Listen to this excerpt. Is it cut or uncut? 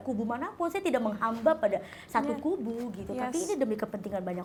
uncut